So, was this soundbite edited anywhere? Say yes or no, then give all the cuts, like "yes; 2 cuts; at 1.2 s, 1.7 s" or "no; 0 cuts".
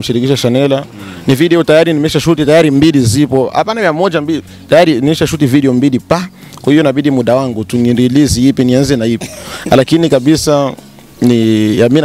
no; 0 cuts